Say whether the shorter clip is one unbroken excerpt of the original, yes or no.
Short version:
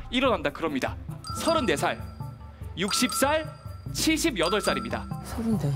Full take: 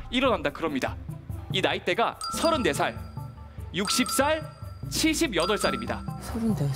no